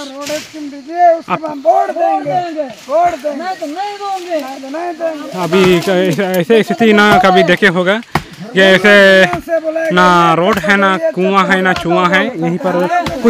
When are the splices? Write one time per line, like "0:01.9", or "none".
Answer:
0:05.3